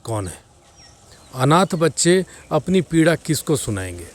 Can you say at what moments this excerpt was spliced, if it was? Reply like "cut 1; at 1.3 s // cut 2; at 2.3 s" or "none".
none